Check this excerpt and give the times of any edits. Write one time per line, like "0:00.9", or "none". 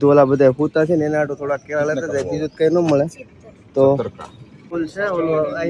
0:04.7